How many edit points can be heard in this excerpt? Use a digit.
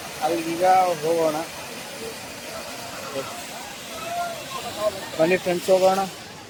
0